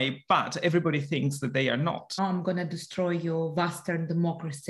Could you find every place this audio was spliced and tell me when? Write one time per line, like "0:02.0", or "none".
0:02.2